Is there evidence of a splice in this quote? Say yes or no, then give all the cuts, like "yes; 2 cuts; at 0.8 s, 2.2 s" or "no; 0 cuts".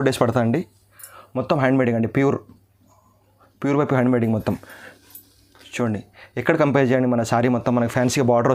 no; 0 cuts